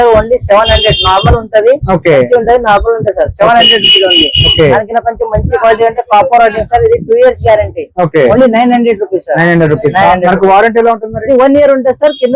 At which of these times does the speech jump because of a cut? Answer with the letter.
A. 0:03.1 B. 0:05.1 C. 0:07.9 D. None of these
D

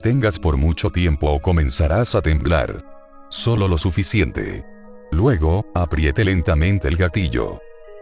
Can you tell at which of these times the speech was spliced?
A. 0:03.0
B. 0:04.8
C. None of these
B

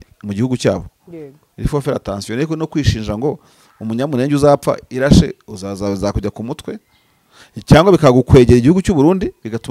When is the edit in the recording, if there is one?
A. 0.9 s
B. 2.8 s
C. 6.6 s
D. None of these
D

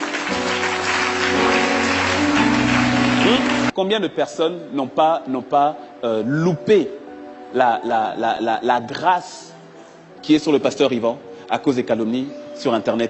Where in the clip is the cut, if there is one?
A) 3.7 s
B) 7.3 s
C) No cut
A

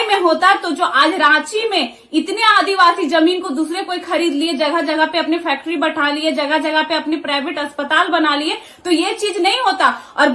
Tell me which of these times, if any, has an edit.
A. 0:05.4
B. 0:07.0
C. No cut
C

